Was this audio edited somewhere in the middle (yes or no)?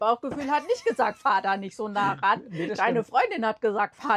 no